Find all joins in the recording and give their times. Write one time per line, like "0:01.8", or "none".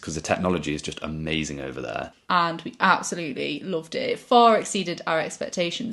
0:02.2